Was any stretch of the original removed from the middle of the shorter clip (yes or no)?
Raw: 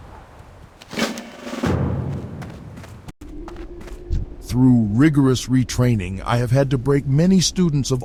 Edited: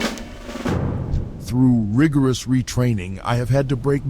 yes